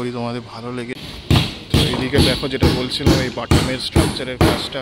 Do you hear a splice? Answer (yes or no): yes